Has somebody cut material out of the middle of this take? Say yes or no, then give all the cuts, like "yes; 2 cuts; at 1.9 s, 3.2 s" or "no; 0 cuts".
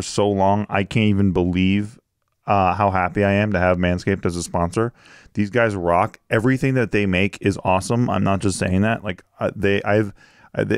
no; 0 cuts